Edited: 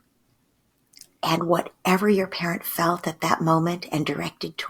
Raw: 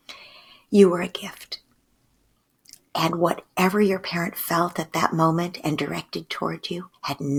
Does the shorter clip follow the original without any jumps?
yes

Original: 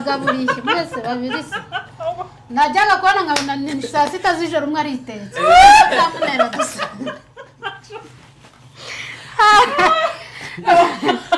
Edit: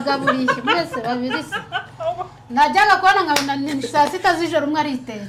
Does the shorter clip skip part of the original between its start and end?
no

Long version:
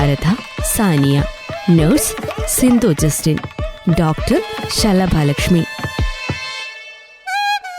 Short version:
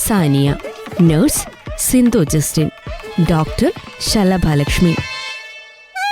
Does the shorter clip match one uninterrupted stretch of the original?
no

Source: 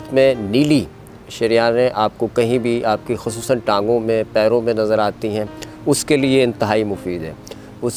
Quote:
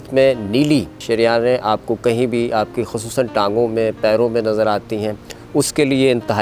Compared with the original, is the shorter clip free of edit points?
no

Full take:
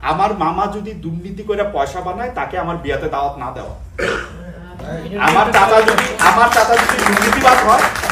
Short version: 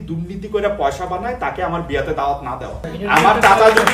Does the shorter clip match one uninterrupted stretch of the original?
no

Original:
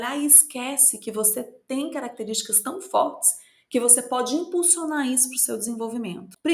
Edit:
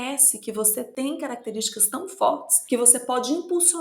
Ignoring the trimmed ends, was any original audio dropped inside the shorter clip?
yes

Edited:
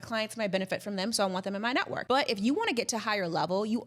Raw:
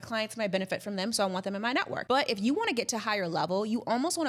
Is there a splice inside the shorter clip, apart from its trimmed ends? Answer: no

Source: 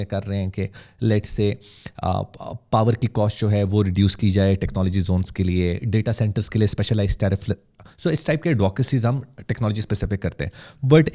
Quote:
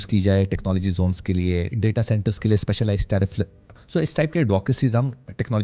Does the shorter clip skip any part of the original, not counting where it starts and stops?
no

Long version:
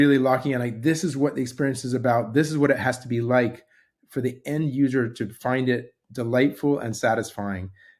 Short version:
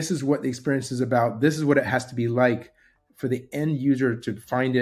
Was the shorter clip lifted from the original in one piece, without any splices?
yes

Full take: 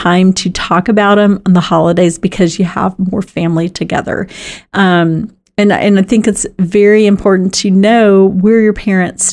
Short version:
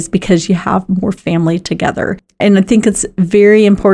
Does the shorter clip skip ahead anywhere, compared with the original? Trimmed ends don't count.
yes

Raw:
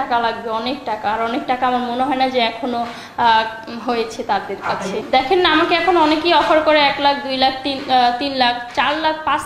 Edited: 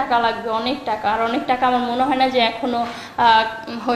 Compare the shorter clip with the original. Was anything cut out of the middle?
no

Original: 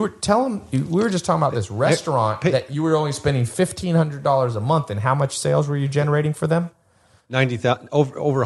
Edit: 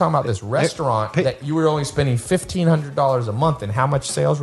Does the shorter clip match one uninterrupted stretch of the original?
yes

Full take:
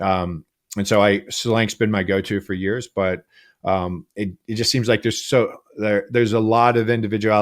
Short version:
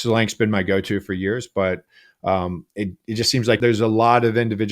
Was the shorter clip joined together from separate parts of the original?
yes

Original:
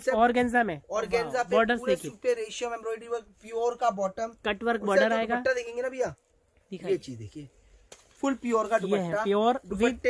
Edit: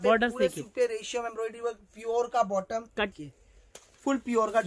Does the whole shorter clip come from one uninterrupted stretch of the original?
no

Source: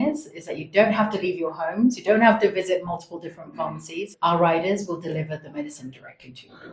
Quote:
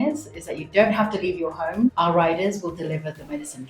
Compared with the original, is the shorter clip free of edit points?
no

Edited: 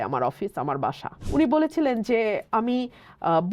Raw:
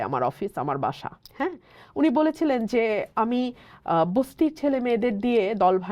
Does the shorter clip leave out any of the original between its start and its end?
yes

